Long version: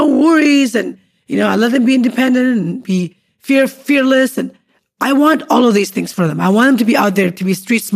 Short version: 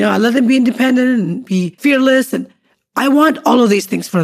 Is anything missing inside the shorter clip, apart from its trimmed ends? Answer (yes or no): yes